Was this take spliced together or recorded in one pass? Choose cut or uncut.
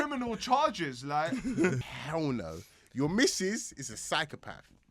cut